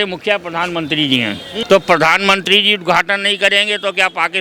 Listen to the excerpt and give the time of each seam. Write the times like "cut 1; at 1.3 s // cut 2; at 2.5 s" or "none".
cut 1; at 1.6 s